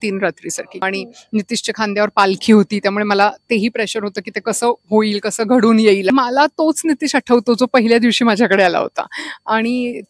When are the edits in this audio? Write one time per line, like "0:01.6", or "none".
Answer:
0:00.9
0:06.1